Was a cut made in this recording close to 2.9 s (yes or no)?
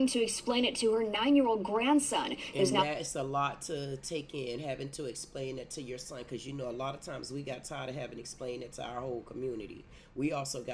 no